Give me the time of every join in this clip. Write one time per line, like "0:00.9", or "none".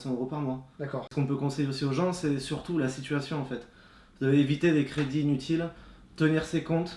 0:01.1